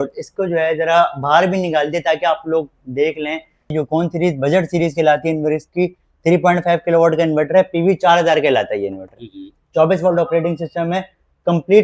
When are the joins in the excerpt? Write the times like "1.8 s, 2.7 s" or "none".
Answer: 3.7 s